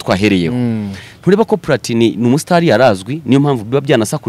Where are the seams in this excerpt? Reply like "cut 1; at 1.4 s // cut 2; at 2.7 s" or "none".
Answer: none